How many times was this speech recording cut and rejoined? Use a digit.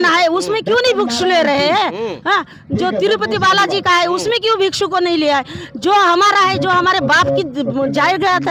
0